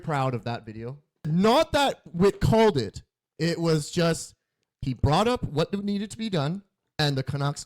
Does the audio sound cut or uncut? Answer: cut